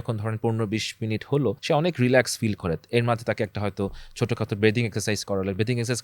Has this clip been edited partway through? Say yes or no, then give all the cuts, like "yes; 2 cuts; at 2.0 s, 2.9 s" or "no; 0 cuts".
yes; 1 cut; at 1.6 s